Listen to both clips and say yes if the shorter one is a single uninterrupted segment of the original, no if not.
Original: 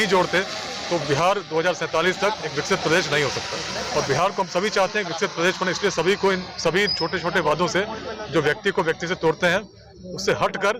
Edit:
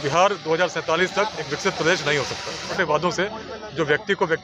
no